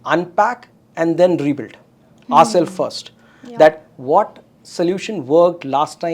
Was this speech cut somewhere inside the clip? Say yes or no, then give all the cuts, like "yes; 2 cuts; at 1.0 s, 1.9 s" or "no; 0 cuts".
no; 0 cuts